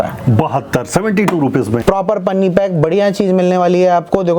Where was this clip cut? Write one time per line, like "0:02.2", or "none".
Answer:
0:01.8